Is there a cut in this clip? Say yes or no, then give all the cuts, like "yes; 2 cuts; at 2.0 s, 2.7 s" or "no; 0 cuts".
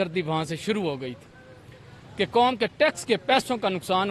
no; 0 cuts